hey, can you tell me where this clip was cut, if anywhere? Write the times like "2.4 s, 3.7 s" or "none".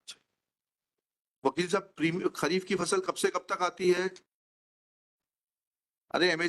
1.0 s